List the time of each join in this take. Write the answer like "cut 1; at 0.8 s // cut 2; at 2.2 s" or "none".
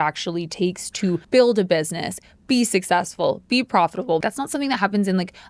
cut 1; at 1.2 s // cut 2; at 4.2 s